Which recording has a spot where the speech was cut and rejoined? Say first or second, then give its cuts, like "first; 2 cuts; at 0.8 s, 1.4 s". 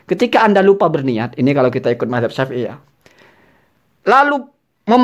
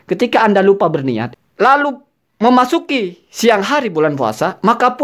second; 1 cut; at 1.3 s